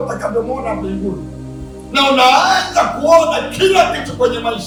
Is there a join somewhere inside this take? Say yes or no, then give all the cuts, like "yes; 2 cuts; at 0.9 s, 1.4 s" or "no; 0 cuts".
no; 0 cuts